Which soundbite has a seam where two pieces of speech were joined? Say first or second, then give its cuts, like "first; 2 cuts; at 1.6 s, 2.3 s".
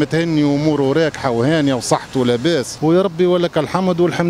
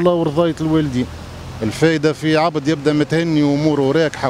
first; 1 cut; at 2.7 s